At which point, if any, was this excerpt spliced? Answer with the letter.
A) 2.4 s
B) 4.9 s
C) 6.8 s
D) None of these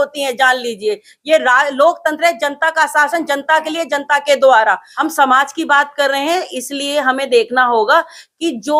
B